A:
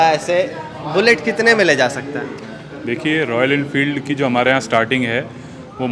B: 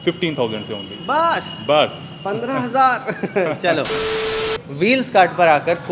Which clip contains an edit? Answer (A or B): B